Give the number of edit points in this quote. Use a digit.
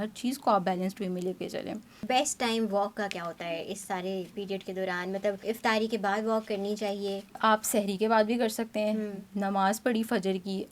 3